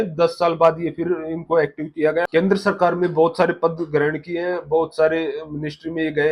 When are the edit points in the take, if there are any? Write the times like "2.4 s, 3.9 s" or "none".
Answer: 2.2 s